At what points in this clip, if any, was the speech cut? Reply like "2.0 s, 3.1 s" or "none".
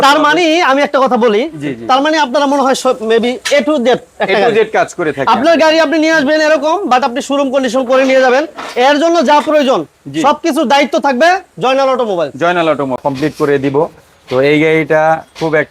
13.0 s